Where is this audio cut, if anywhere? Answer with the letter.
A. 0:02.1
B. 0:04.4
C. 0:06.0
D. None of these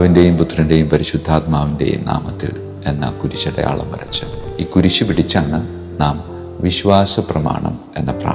B